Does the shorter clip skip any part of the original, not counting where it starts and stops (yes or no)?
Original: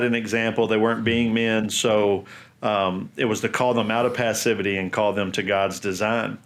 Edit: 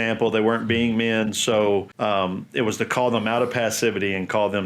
yes